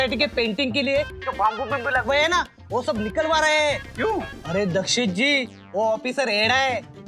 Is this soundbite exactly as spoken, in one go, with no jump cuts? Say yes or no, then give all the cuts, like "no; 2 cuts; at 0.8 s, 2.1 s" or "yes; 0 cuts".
no; 1 cut; at 4.4 s